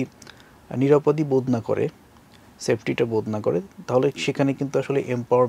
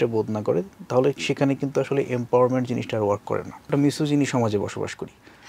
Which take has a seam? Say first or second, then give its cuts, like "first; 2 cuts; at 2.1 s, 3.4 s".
second; 1 cut; at 3.7 s